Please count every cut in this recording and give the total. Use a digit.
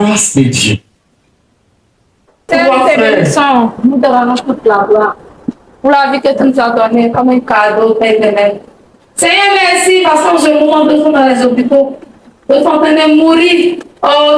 1